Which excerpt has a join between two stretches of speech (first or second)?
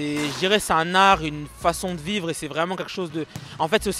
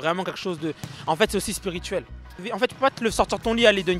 second